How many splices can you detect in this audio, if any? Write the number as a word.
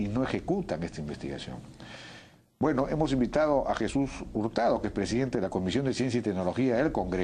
one